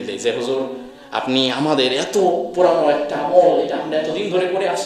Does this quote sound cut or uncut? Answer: uncut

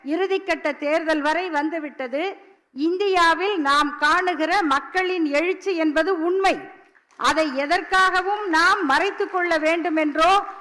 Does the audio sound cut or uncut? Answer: uncut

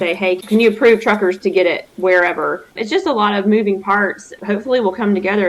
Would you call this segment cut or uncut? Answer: cut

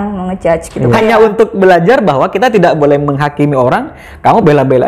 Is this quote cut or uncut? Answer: cut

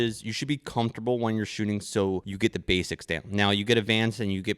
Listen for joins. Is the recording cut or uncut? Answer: cut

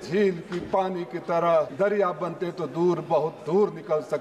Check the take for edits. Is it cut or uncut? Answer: cut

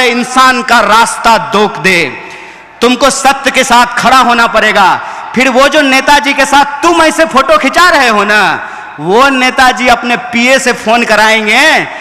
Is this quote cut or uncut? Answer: uncut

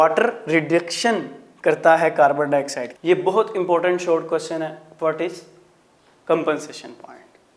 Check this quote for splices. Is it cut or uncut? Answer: cut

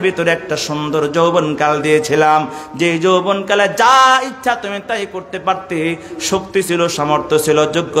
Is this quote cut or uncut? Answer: uncut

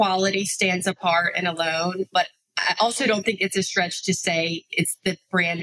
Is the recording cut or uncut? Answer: uncut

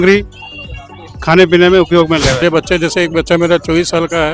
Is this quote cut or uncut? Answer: cut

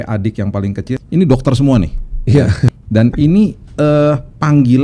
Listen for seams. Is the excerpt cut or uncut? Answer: cut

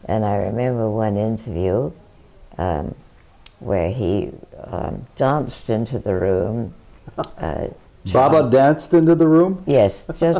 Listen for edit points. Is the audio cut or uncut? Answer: uncut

